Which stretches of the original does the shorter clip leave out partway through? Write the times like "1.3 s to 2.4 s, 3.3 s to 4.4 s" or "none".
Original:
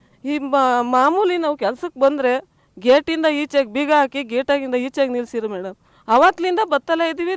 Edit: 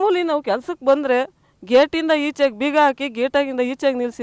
none